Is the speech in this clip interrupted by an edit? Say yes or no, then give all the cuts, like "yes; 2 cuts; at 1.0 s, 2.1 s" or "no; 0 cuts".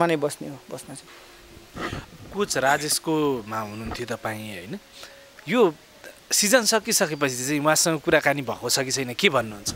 no; 0 cuts